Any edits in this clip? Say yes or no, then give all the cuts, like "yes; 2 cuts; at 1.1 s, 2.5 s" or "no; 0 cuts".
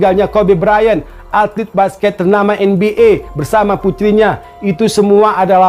no; 0 cuts